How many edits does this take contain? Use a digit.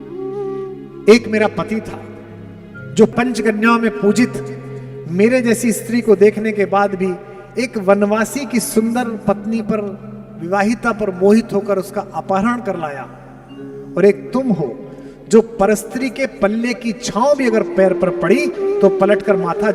0